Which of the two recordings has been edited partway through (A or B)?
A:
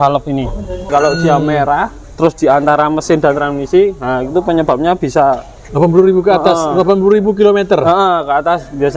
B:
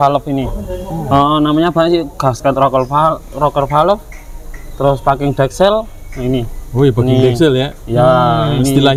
A